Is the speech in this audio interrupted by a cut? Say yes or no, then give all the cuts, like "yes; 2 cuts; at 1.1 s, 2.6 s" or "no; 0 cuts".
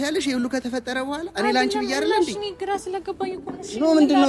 no; 0 cuts